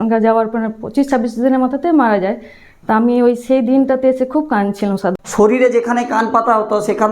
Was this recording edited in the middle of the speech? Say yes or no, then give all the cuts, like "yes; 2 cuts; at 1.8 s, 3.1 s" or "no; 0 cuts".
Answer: yes; 1 cut; at 5.2 s